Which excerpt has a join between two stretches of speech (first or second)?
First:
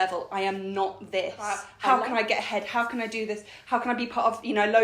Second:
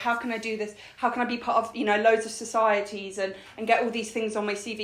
first